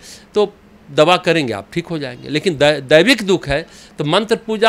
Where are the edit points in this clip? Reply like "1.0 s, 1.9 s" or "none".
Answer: none

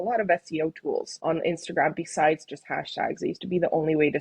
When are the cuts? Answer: 1.1 s

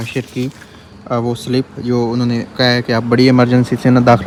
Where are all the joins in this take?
none

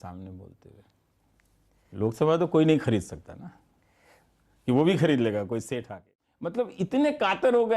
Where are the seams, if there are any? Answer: 6.0 s

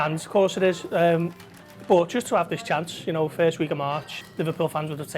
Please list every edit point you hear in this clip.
4.2 s

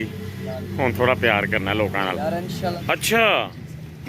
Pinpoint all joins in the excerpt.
2.7 s

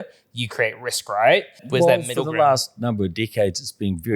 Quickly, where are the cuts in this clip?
1.6 s

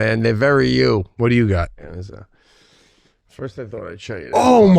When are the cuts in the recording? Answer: 1.1 s

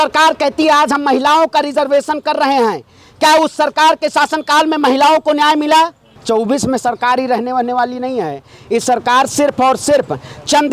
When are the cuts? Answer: 6.1 s

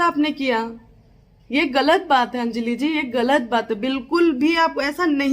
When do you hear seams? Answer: 2.4 s

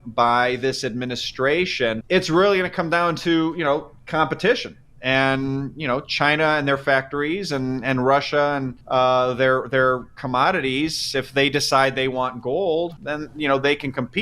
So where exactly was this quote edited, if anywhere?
2.0 s

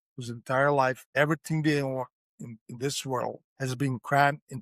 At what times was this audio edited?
1.0 s, 3.5 s

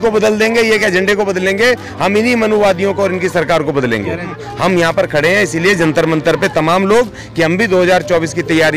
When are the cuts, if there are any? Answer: 4.4 s

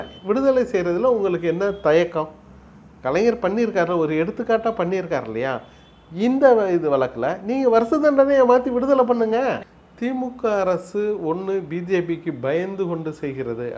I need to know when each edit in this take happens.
9.7 s

